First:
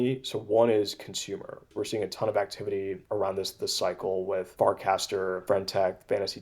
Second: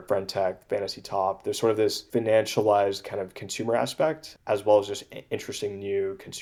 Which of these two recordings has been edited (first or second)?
first